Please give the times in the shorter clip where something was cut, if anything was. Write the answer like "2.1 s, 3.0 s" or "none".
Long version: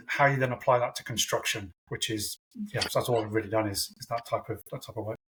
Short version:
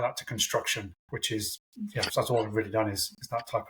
none